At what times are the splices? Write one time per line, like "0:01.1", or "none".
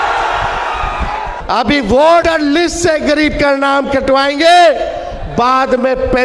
0:01.3
0:02.2